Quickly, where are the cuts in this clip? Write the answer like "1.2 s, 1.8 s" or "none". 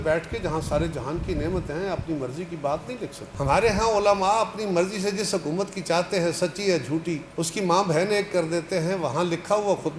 3.3 s, 7.2 s